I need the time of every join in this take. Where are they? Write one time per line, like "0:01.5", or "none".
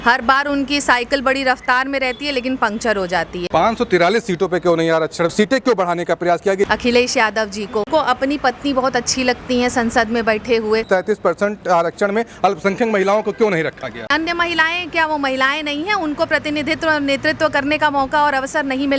0:03.4
0:06.6
0:07.9
0:10.8
0:14.1

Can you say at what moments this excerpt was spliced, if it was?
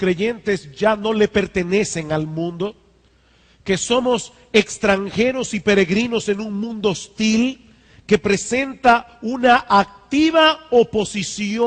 0:09.0

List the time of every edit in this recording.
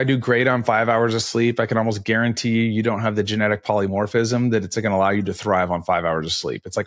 none

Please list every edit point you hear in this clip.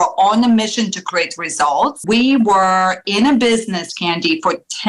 0:02.0

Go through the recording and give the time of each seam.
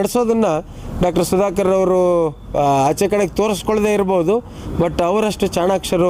none

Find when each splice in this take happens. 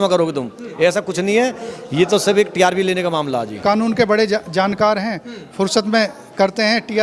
0:03.5

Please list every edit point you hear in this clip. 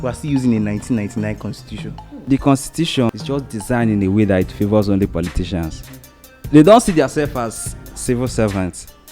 0:02.2
0:03.1

